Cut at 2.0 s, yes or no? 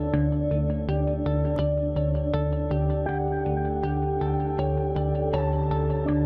yes